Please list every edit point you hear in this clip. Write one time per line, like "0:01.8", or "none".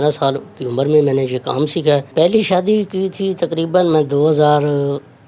0:02.1